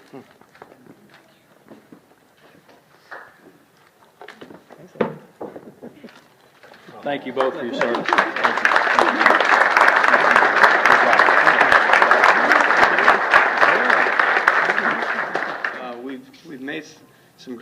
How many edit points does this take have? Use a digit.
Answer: 1